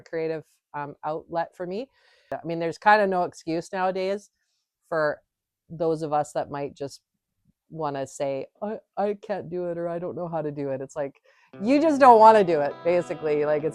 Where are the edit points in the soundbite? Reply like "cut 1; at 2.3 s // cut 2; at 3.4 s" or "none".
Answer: cut 1; at 2.4 s